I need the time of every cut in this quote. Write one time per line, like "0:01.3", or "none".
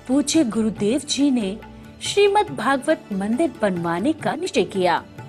0:04.3